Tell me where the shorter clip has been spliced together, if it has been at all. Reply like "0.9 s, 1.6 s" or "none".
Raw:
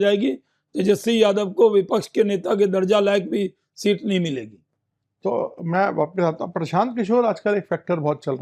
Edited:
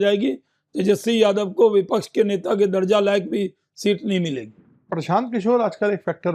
4.9 s